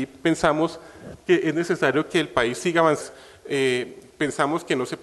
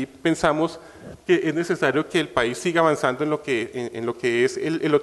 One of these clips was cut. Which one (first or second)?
second